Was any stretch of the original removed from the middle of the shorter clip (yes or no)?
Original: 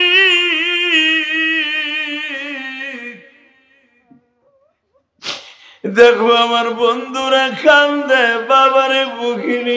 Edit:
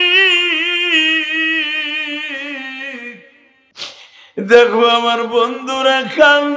yes